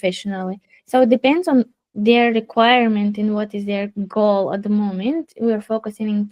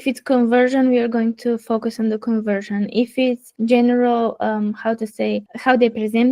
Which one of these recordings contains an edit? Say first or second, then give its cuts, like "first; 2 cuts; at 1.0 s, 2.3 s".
second; 2 cuts; at 3.5 s, 5.5 s